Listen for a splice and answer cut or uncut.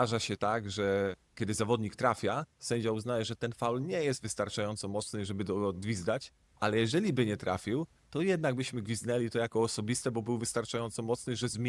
uncut